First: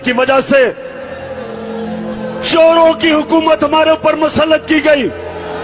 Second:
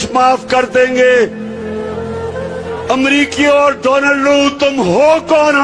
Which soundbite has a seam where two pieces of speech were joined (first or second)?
second